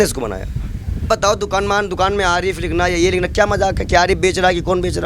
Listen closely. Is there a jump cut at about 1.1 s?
yes; 1 cut; at 1.1 s

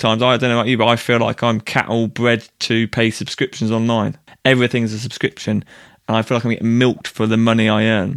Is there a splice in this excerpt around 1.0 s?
no; 1 cut; at 4.2 s

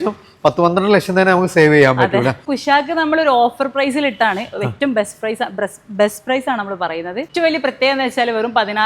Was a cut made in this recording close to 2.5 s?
yes; 2 cuts; at 2.5 s, 7.3 s

